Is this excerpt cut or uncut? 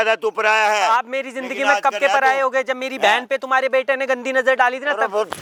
uncut